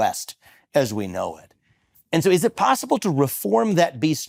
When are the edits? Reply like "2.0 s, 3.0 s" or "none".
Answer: none